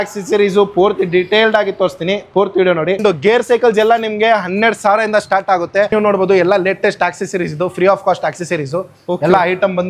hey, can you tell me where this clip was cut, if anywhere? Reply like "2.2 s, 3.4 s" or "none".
3.0 s, 5.9 s